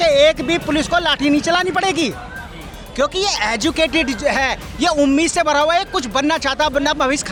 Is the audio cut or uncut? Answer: uncut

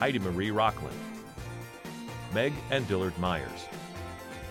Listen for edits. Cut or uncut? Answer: uncut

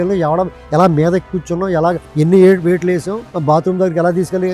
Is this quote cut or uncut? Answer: cut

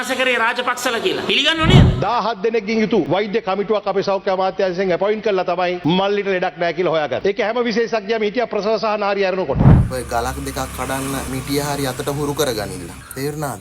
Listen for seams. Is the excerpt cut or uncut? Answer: cut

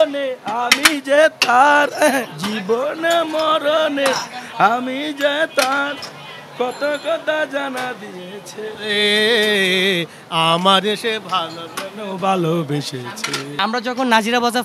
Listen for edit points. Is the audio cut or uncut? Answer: cut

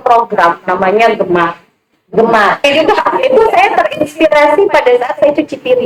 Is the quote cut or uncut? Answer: cut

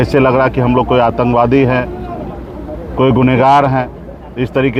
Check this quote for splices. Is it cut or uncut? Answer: uncut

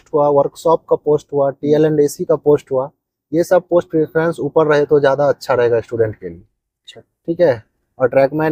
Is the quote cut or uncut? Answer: uncut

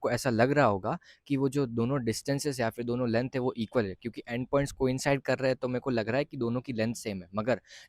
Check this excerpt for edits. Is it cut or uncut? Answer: uncut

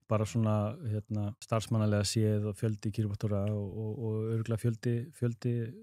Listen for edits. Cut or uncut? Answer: cut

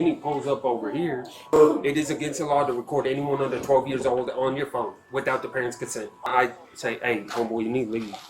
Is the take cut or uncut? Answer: cut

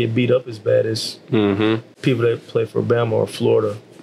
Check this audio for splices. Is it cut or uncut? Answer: cut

